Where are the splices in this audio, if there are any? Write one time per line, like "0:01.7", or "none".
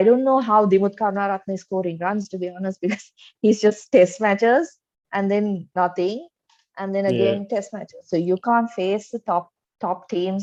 none